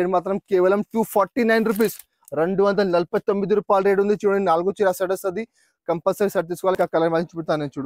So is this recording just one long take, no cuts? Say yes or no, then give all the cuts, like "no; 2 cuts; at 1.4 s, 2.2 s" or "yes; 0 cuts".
no; 1 cut; at 6.8 s